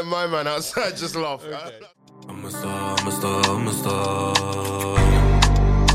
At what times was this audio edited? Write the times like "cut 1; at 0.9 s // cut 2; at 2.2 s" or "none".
cut 1; at 1.7 s

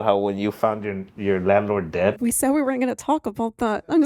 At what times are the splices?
cut 1; at 2.3 s

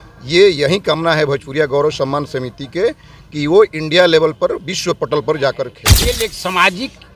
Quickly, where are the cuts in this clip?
cut 1; at 5.9 s

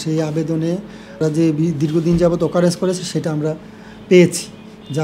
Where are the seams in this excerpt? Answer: cut 1; at 1.2 s

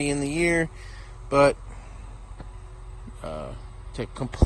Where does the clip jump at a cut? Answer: none

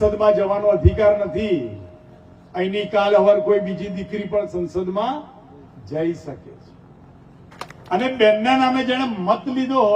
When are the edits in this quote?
cut 1; at 7.5 s

